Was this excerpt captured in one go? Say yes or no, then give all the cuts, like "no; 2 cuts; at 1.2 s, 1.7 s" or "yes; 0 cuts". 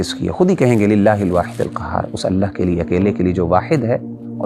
yes; 0 cuts